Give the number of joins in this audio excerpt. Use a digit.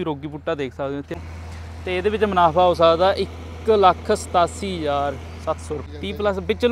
2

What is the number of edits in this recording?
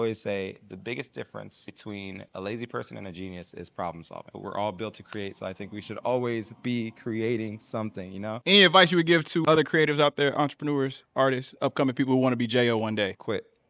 3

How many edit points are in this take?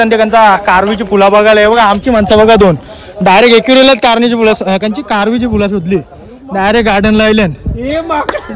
0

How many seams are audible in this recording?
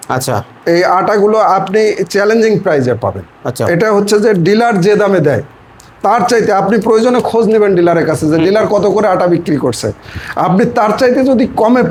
0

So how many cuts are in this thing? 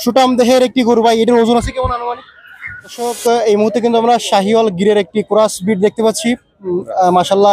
1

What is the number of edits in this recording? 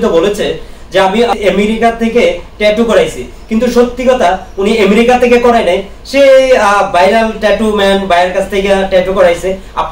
1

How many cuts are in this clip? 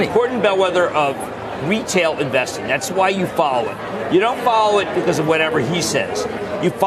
0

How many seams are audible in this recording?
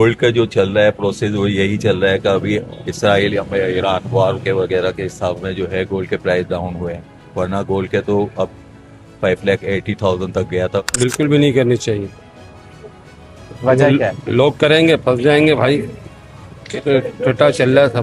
1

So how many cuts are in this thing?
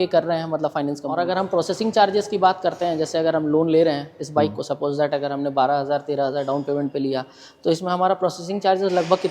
1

